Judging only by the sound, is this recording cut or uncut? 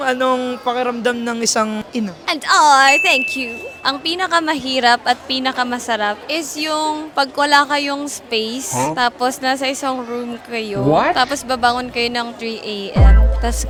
uncut